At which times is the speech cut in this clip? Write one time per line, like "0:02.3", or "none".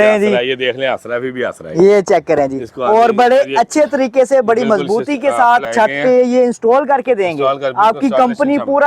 0:05.7